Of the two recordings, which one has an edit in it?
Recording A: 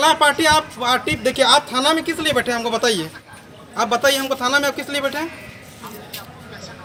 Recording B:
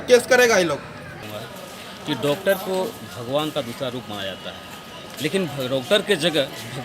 B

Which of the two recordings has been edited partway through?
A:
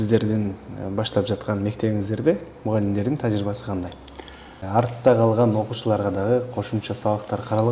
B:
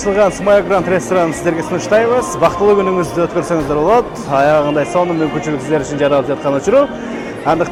A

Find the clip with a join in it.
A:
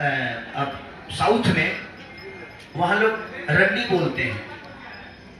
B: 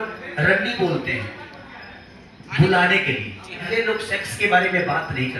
B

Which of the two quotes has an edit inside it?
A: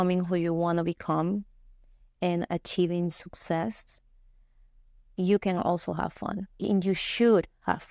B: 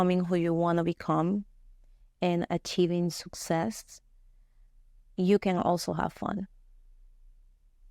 A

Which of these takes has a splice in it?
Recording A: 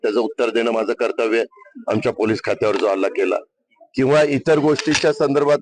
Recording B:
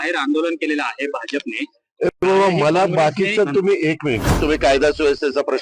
B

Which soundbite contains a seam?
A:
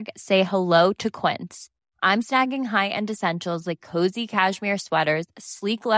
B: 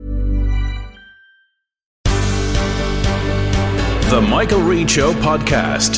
B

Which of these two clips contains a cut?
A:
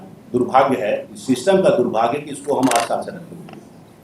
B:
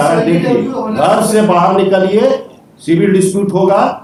A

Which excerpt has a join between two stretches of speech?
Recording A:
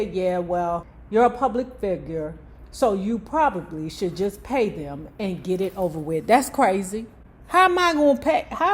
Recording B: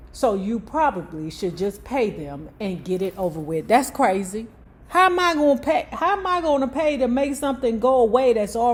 A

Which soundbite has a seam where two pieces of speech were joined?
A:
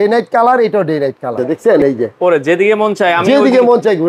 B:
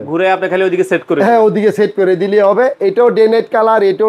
A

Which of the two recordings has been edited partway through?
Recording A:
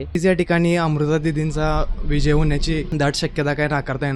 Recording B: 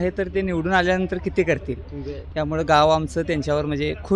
A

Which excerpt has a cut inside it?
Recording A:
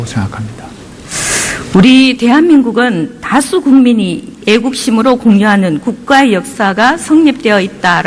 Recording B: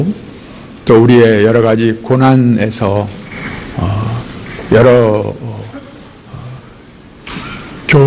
B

